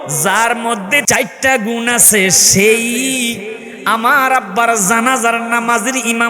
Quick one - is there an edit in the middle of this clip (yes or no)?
yes